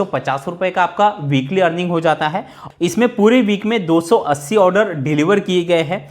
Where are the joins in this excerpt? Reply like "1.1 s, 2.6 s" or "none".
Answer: 2.6 s

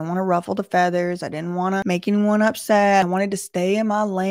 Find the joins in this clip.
1.8 s, 3.0 s

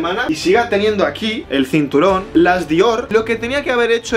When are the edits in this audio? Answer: 3.0 s

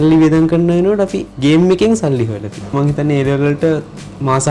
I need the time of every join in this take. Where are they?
2.7 s

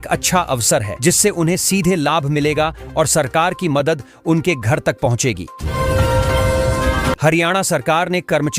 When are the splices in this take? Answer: 5.5 s, 7.2 s

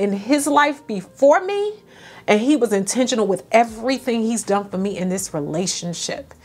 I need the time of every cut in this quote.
none

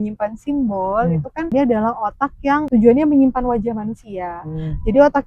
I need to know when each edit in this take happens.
1.5 s, 2.7 s

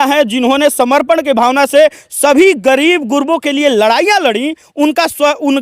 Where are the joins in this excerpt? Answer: none

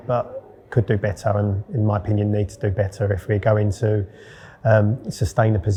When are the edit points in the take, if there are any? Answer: none

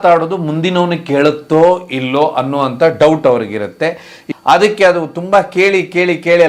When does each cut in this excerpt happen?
4.2 s

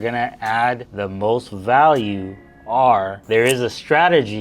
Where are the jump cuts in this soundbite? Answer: 0.9 s, 3.2 s

